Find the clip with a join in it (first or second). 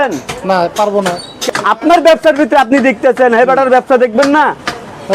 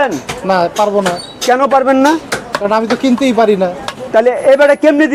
first